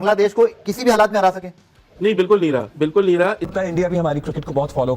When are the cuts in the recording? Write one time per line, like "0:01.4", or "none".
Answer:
0:03.4